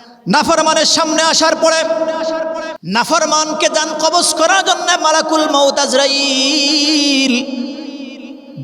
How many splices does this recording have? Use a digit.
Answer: 1